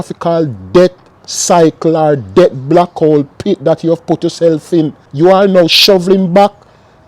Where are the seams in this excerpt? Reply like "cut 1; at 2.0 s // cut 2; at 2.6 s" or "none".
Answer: cut 1; at 5.1 s